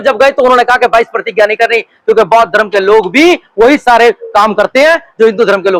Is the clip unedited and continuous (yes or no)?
yes